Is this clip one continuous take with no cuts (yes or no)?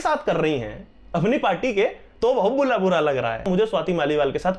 no